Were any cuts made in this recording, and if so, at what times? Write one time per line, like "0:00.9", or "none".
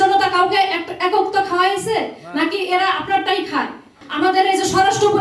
0:04.0